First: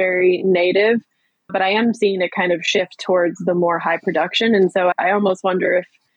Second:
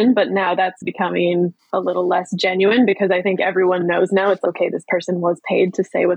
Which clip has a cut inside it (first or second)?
second